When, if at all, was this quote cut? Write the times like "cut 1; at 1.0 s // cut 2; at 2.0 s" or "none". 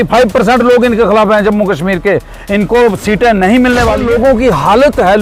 cut 1; at 4.0 s